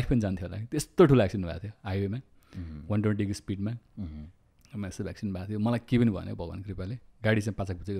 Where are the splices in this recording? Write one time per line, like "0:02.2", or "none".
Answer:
none